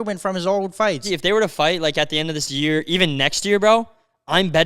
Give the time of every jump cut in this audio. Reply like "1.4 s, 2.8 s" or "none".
1.0 s